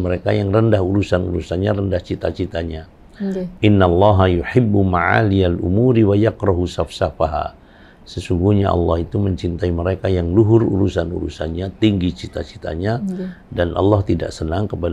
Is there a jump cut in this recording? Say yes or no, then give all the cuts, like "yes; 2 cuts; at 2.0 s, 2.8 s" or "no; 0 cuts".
no; 0 cuts